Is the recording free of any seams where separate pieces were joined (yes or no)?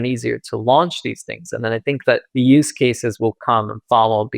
no